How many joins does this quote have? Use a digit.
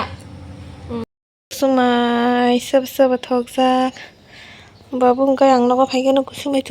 1